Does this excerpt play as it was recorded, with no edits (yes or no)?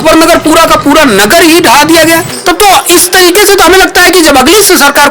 no